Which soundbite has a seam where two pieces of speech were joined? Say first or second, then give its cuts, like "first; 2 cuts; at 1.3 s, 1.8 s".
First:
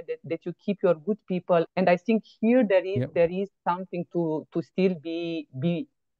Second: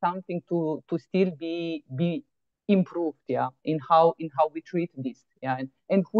first; 1 cut; at 1.7 s